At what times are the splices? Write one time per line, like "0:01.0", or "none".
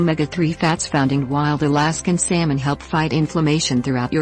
0:02.7